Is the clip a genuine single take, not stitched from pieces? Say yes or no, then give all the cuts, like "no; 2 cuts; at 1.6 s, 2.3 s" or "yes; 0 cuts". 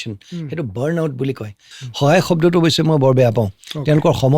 no; 1 cut; at 1.7 s